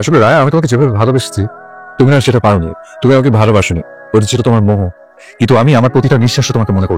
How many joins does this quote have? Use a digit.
0